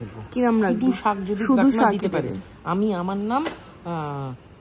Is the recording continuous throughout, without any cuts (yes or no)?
yes